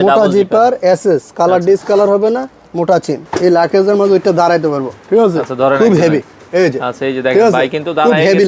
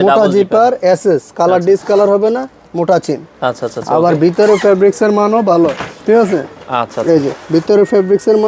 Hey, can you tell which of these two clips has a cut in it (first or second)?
first